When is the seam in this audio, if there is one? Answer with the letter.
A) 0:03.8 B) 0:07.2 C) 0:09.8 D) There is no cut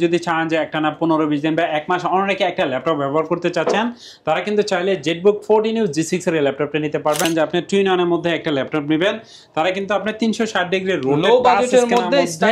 B